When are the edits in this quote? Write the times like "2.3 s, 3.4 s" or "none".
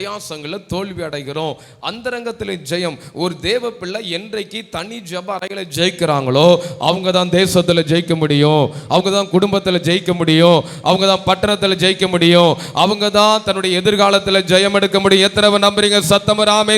none